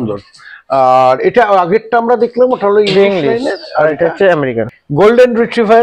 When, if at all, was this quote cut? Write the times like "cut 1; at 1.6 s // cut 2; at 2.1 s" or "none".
cut 1; at 4.6 s